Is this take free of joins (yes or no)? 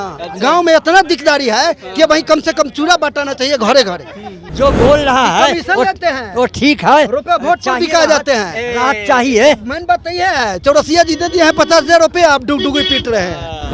no